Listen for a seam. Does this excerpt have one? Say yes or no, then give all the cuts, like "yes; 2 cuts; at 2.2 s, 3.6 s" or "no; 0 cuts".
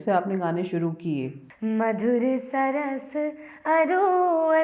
yes; 1 cut; at 1.4 s